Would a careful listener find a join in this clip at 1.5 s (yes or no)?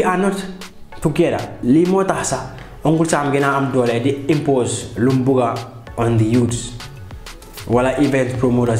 yes